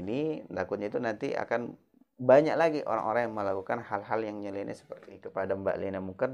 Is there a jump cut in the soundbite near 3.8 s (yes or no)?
no